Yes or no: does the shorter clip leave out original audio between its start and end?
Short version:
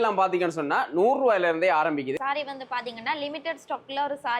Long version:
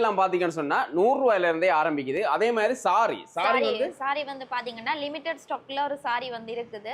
yes